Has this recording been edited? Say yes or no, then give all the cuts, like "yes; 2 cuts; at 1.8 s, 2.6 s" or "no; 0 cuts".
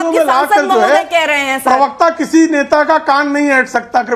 no; 0 cuts